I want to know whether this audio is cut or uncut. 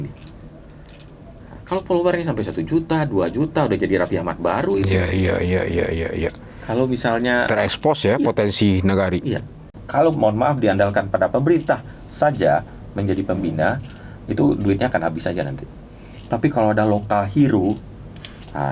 cut